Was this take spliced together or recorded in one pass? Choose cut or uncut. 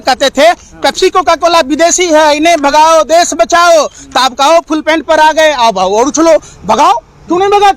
uncut